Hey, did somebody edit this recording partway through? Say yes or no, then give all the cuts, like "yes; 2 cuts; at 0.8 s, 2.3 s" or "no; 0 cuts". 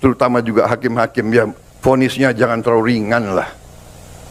no; 0 cuts